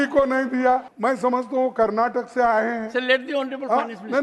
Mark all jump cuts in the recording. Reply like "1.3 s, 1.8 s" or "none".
0.9 s